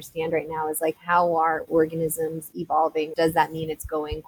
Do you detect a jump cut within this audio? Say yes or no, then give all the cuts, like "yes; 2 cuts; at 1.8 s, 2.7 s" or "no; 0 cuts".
yes; 1 cut; at 3.1 s